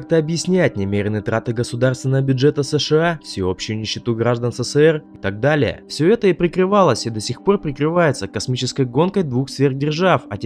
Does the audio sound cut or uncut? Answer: cut